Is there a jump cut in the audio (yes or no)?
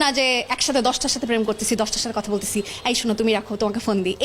no